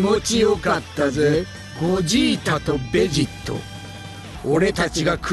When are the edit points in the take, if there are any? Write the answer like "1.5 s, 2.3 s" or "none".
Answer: 1.6 s